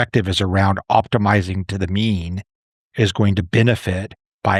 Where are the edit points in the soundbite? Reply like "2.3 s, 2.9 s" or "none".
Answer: none